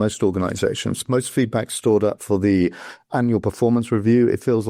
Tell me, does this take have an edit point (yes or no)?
no